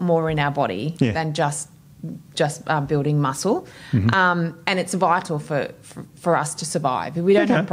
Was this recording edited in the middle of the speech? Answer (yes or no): no